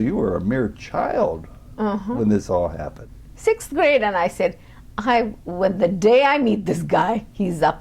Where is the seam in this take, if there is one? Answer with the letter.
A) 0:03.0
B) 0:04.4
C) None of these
A